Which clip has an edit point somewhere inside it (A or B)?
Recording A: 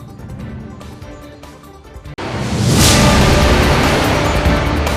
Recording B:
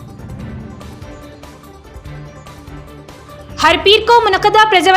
B